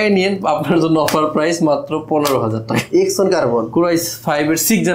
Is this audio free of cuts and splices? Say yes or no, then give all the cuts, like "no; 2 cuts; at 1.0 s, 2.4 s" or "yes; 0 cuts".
yes; 0 cuts